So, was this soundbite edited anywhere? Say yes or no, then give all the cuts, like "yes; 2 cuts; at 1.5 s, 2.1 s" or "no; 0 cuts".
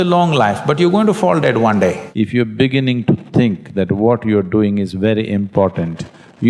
yes; 1 cut; at 2.0 s